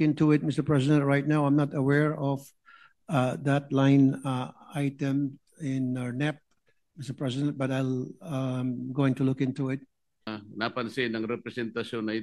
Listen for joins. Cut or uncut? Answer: cut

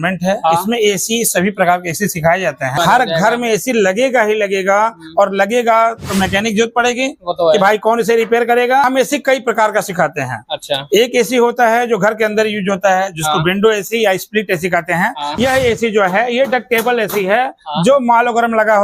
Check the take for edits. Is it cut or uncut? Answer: cut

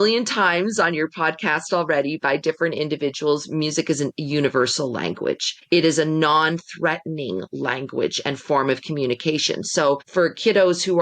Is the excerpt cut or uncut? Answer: cut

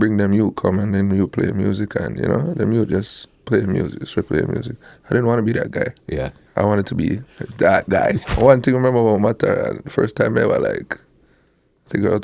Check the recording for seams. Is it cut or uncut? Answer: cut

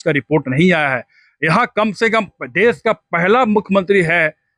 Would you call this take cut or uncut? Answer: uncut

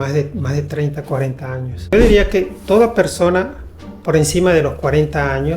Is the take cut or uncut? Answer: cut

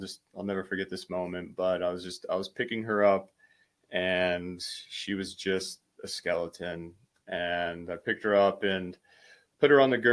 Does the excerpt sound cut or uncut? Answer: uncut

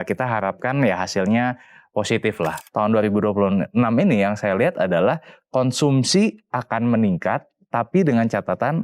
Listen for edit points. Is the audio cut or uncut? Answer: cut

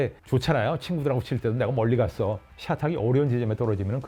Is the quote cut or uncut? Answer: cut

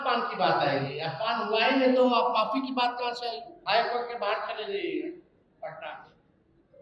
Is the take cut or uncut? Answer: cut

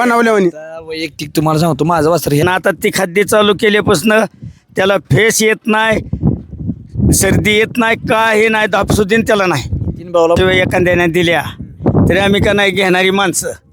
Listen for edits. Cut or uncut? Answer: cut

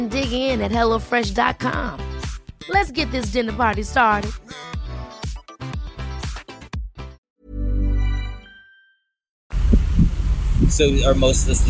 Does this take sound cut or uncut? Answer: uncut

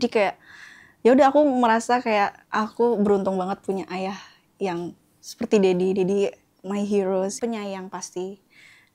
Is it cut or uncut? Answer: cut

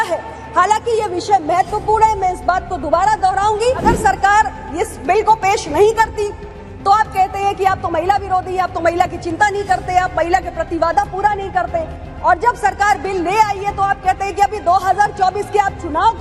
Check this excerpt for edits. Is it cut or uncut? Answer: cut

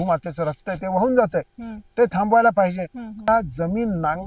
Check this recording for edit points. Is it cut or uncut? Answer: cut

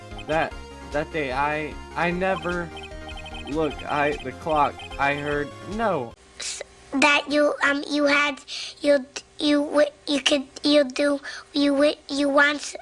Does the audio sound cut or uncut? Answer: uncut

